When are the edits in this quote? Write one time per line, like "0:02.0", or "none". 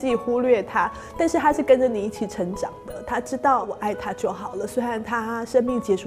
0:03.8

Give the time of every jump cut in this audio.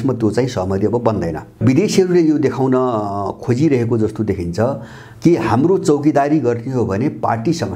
0:01.6

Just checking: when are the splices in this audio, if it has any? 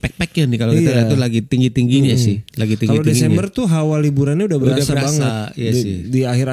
none

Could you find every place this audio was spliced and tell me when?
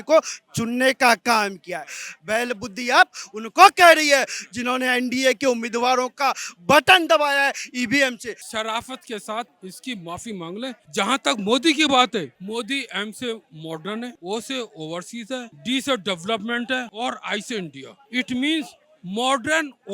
0:08.5
0:09.6
0:10.8
0:14.1
0:16.9

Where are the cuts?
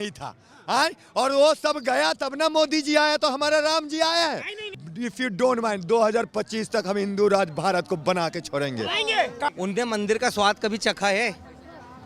0:04.7
0:09.5

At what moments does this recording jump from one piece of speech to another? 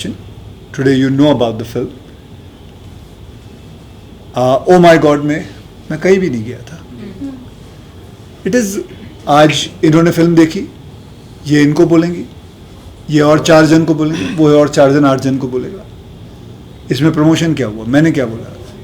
none

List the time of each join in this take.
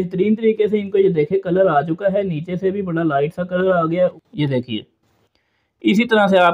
0:04.2

